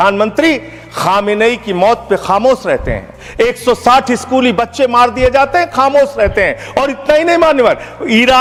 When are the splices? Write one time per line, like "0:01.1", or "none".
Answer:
none